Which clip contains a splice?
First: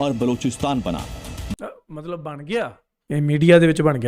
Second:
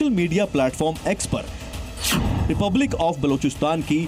first; 1 cut; at 2.9 s

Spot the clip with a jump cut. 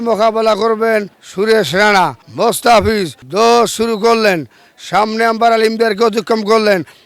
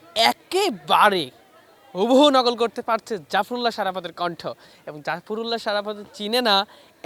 first; 3 cuts; at 1.2 s, 2.2 s, 3.2 s

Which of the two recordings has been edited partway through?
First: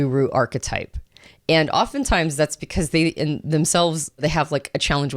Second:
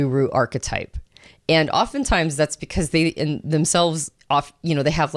first; 1 cut; at 4.2 s

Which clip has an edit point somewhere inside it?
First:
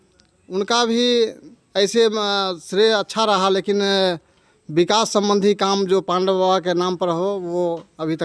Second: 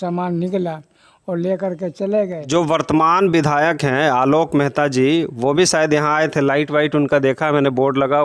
second; 1 cut; at 2.4 s

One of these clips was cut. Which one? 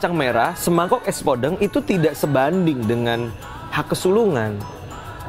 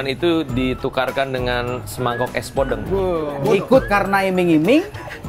second; 1 cut; at 3.1 s

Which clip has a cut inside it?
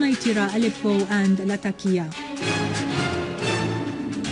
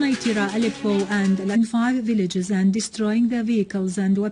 first; 1 cut; at 1.5 s

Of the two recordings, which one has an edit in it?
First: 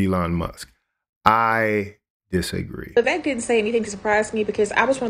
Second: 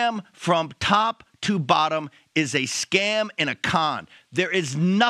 first; 1 cut; at 3.0 s

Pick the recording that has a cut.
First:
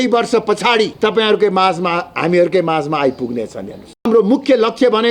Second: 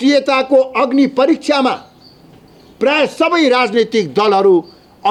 first; 2 cuts; at 0.9 s, 4.1 s

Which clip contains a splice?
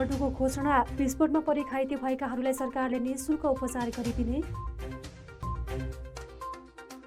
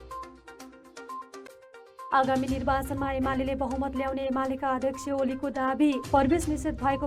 second; 1 cut; at 2.1 s

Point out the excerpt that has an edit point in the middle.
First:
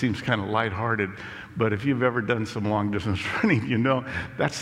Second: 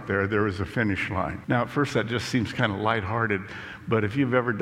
second; 1 cut; at 1.4 s

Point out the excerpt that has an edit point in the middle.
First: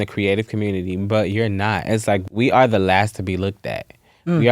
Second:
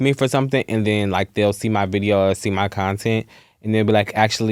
first; 1 cut; at 2.3 s

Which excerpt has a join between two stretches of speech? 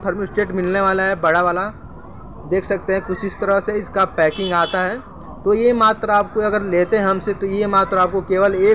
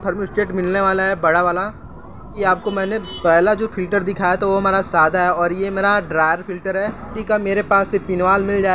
second; 2 cuts; at 2.3 s, 7.2 s

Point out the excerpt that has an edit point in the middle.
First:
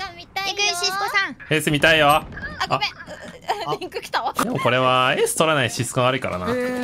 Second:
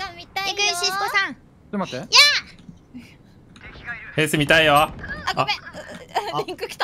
first; 2 cuts; at 1.4 s, 4.4 s

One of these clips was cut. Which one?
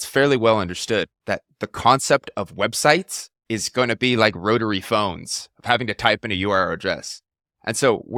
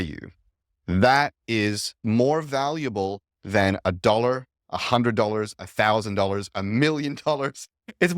second; 1 cut; at 2.0 s

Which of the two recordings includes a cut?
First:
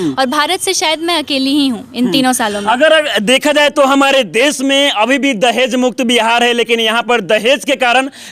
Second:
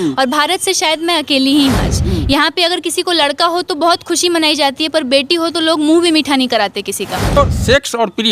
second; 2 cuts; at 1.9 s, 7.4 s

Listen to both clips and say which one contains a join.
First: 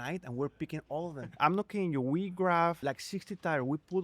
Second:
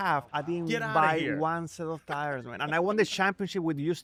first; 2 cuts; at 1.3 s, 2.8 s

